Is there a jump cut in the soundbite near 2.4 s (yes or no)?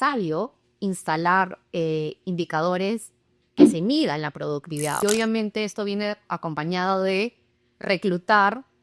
no